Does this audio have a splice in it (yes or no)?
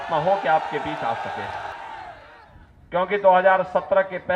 yes